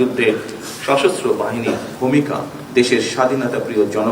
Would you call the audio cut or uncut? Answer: cut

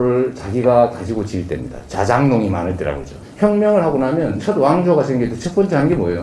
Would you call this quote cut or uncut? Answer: cut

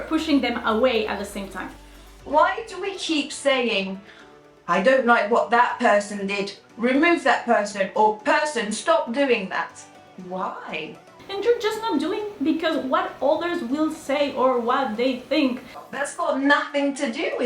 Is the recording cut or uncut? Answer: cut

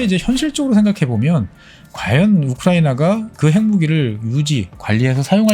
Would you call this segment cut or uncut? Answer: cut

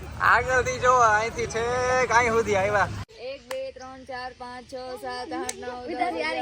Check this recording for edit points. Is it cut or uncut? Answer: cut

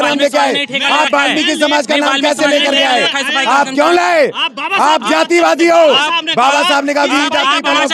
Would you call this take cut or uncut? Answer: uncut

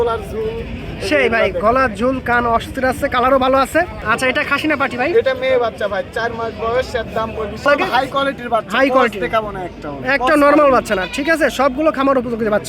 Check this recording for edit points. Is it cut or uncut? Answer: cut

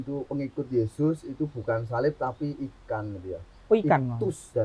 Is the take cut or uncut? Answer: uncut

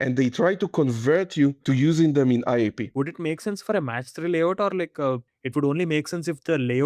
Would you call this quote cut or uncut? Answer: cut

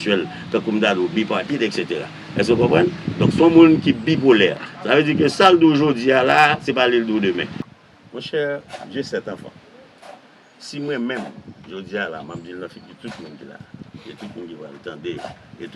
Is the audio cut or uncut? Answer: cut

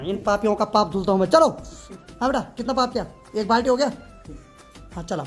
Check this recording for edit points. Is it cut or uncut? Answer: uncut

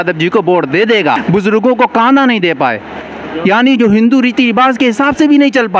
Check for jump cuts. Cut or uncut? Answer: cut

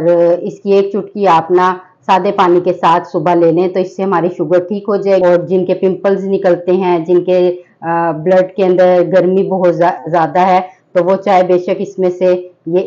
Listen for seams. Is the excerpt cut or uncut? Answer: cut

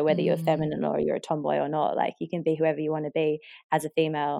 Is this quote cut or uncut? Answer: uncut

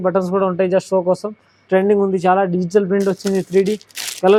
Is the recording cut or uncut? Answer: uncut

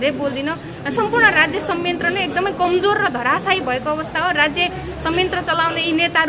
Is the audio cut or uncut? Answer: uncut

